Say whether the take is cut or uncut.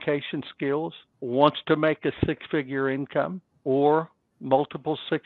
cut